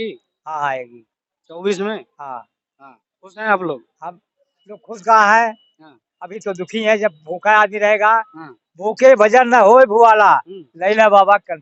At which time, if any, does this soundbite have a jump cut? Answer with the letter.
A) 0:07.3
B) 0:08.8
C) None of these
C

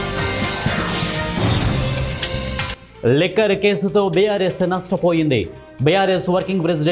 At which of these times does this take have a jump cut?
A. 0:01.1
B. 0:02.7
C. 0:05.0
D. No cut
B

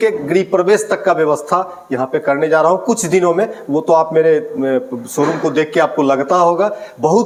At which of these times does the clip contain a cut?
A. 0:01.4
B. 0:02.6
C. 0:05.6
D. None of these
D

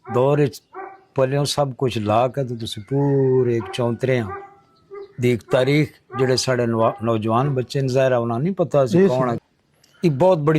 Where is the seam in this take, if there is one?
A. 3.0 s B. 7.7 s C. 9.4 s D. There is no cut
C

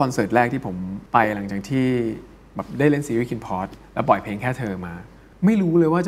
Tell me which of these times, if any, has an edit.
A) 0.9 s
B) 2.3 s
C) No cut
A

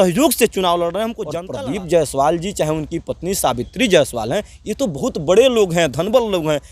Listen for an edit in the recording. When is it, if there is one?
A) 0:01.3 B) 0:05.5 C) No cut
A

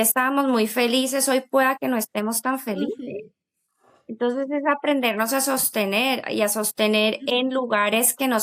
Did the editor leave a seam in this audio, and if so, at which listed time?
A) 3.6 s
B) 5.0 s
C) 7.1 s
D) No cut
D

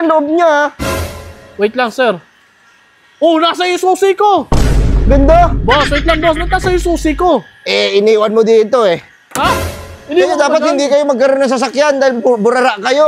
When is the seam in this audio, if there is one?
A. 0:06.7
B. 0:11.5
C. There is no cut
C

